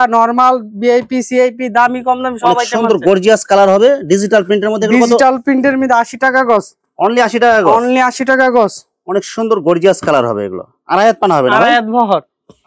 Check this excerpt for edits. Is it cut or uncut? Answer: uncut